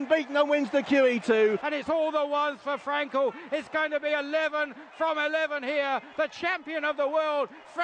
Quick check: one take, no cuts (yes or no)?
no